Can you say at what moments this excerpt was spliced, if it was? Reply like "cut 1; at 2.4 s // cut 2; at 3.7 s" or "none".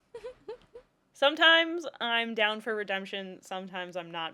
cut 1; at 1.0 s